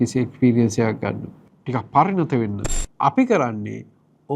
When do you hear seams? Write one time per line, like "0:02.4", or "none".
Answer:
0:02.6